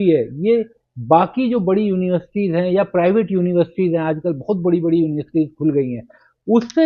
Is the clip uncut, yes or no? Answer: yes